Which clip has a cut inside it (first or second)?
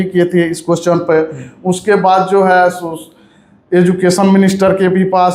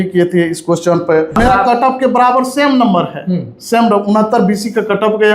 second